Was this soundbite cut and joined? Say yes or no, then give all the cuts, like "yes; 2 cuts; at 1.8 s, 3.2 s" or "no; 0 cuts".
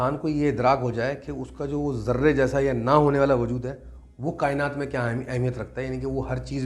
no; 0 cuts